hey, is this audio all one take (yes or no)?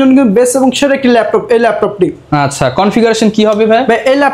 yes